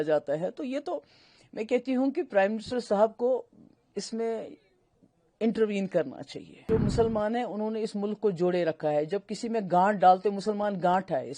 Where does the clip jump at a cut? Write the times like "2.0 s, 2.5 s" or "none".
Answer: 6.7 s